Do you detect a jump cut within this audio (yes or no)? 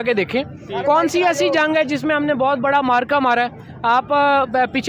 no